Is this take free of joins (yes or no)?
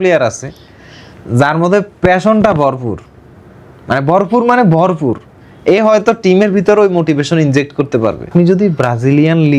no